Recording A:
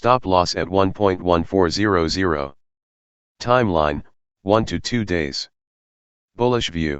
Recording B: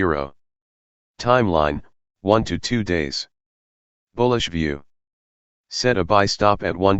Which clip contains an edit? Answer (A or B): A